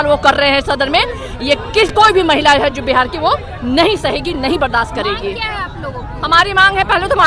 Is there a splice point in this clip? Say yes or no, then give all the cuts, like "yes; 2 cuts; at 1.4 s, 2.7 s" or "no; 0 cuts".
no; 0 cuts